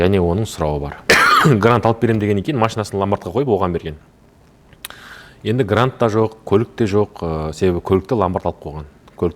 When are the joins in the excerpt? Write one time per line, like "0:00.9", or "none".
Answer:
0:00.9

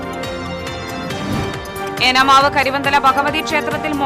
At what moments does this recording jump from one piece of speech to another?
none

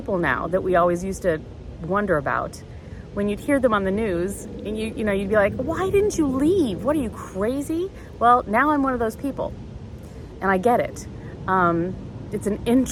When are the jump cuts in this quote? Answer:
none

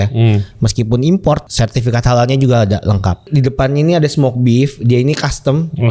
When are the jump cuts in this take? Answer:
0:01.5
0:03.3

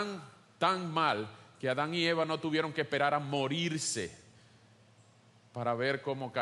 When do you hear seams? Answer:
none

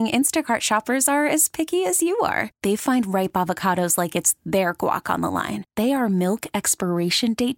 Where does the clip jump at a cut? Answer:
none

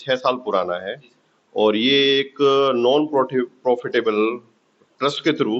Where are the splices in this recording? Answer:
none

